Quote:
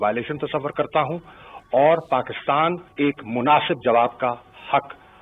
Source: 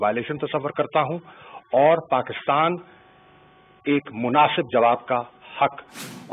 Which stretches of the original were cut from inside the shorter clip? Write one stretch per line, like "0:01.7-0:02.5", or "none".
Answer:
0:02.8-0:03.7